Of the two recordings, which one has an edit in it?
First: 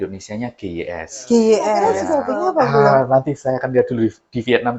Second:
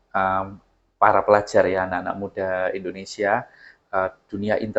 first; 1 cut; at 2.0 s

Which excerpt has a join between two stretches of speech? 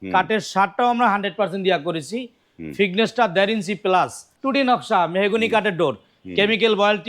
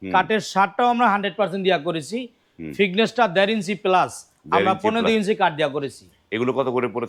first; 1 cut; at 4.3 s

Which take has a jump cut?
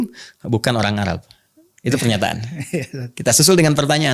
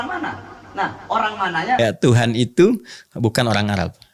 second; 1 cut; at 1.8 s

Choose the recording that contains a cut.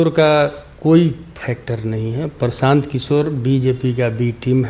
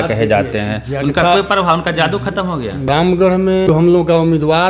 second; 2 cuts; at 2.9 s, 3.7 s

